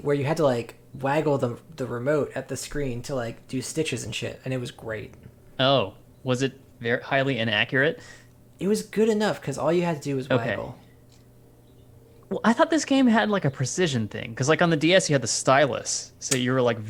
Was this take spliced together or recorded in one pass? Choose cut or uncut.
uncut